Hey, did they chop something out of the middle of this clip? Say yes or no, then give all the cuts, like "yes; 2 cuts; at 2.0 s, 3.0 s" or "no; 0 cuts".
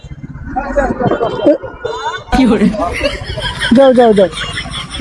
no; 0 cuts